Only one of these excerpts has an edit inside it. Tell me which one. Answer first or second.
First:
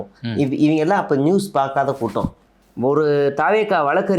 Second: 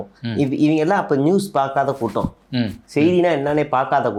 first